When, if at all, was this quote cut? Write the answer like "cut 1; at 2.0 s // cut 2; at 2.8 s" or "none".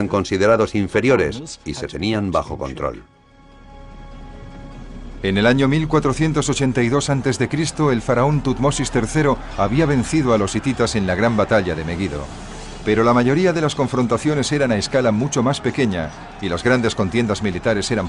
none